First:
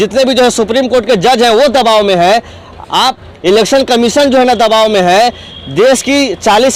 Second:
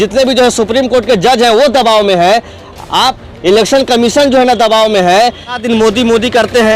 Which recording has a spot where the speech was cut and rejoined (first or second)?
second